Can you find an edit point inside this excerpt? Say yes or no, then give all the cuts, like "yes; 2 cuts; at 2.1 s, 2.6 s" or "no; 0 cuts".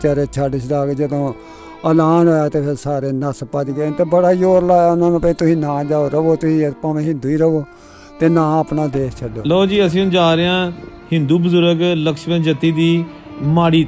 yes; 1 cut; at 9.3 s